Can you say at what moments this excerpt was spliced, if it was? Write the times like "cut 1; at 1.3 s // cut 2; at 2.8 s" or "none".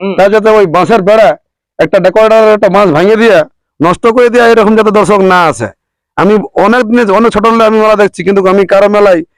none